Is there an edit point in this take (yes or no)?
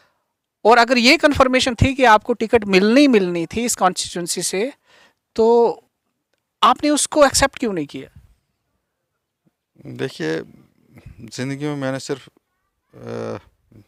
no